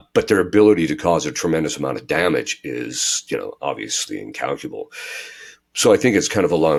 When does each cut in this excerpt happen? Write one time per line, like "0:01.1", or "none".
none